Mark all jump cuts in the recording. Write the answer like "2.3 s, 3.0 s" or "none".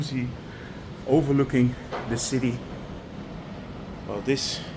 3.1 s

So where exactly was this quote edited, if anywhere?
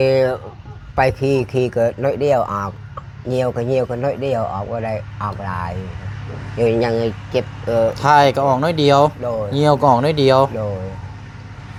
none

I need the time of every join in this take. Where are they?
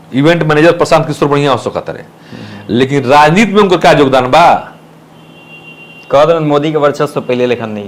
none

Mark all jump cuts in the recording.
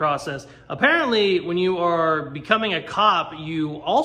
none

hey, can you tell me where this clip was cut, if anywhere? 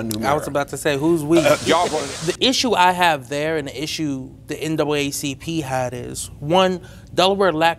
1.9 s

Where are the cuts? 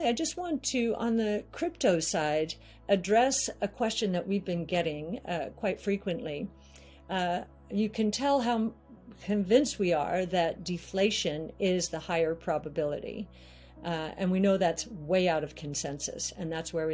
none

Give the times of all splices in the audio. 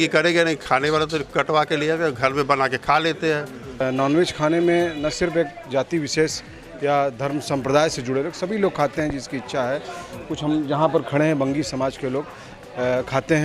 3.8 s

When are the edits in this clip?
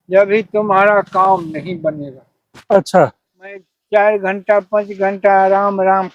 3.8 s

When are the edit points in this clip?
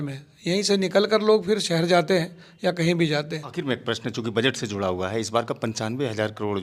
3.6 s

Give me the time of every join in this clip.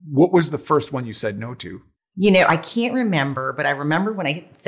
none

